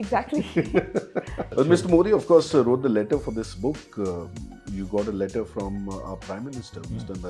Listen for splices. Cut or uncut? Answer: cut